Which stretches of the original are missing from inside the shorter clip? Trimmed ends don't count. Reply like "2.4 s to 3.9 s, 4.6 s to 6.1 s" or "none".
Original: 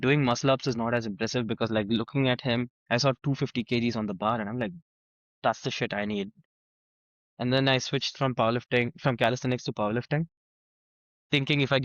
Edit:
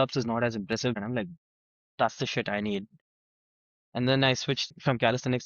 1.5 s to 4.4 s, 8.2 s to 8.9 s